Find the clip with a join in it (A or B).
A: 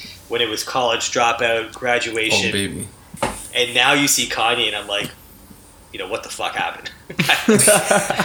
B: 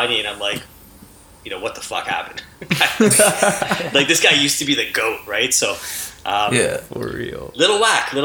A